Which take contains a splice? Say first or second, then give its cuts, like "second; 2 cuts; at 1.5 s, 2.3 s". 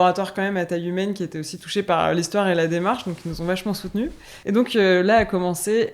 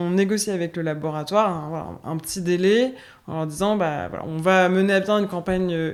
first; 1 cut; at 4.3 s